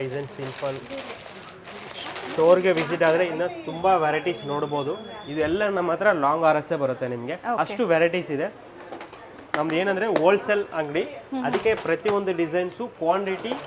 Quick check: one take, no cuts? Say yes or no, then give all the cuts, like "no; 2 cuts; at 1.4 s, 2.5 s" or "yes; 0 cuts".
yes; 0 cuts